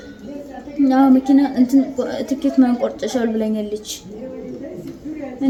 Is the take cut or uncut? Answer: uncut